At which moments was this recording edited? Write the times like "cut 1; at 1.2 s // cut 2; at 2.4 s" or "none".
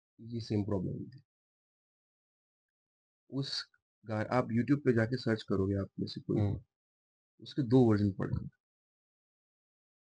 none